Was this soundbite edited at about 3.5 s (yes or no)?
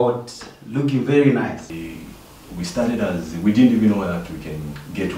no